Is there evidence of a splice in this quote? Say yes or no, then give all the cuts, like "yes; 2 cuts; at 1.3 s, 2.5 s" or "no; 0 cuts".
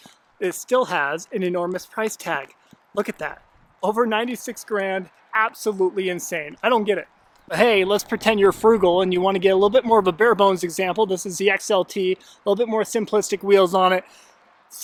no; 0 cuts